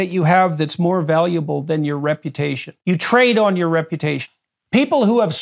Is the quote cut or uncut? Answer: cut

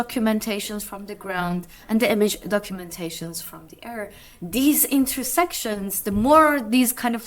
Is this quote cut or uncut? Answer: uncut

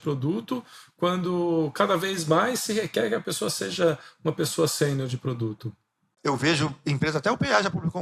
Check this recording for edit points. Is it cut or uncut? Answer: cut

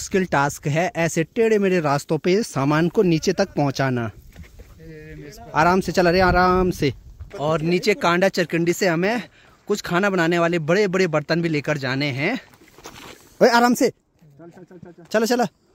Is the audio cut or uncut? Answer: uncut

